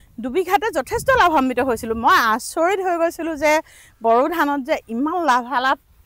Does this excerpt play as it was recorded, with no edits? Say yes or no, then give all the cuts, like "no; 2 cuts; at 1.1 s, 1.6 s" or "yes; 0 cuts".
yes; 0 cuts